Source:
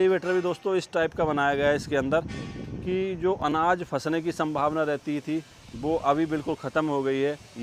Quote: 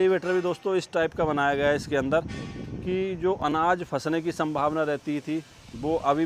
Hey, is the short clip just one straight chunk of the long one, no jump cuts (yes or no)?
yes